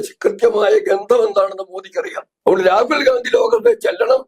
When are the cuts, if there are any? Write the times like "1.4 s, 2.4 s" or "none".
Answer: 2.2 s